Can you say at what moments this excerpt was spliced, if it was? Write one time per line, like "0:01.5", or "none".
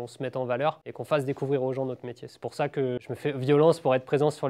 0:00.9
0:03.0